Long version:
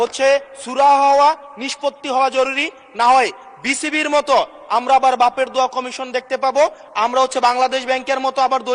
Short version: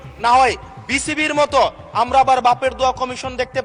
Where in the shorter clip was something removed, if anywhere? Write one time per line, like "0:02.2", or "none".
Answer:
none